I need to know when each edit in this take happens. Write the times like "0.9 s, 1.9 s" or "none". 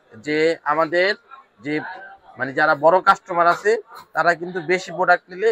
none